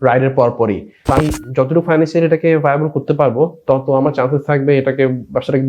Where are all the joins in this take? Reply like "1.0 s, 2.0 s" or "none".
1.2 s